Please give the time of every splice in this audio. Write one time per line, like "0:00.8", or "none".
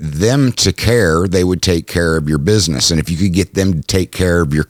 none

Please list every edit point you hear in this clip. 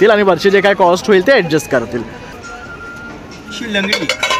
0:02.3

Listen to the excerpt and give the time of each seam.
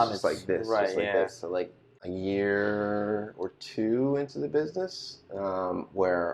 0:01.8

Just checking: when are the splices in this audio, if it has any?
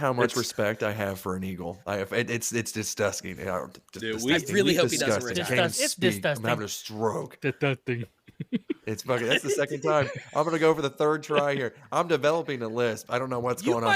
none

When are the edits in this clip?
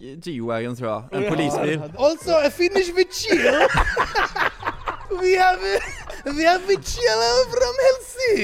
0:01.9
0:05.0

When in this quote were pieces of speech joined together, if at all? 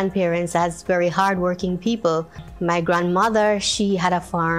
0:02.5

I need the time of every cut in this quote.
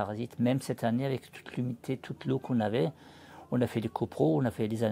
none

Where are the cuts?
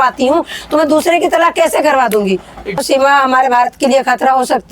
0:02.8

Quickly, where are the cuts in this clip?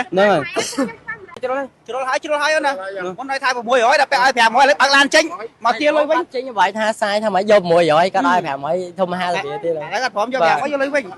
0:01.4

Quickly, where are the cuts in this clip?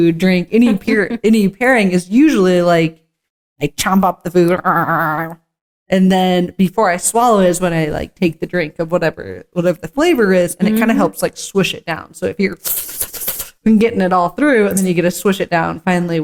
none

